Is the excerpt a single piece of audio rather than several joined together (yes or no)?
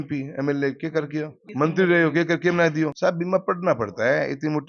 no